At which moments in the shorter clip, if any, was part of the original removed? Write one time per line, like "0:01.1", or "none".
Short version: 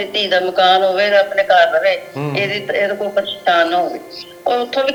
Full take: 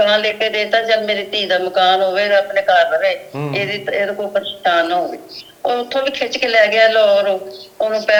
none